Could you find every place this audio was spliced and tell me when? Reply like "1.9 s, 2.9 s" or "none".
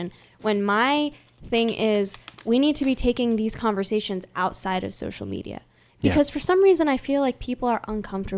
none